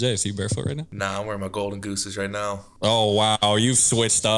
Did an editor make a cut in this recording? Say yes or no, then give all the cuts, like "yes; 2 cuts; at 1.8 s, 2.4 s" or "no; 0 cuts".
yes; 2 cuts; at 0.9 s, 2.7 s